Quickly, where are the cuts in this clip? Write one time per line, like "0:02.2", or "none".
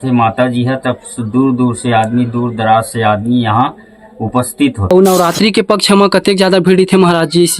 0:04.9

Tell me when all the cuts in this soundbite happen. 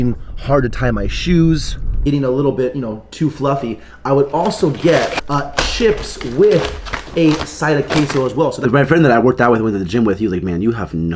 0:02.0
0:08.6

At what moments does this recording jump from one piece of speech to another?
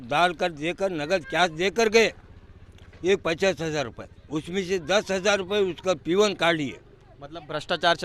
none

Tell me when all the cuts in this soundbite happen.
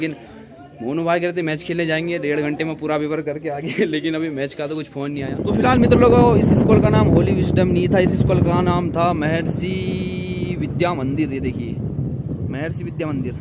0:05.4

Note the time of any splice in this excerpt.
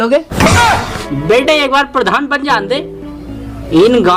0:01.0

